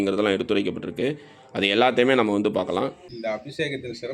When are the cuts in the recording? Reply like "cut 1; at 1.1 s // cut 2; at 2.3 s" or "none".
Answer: cut 1; at 3.1 s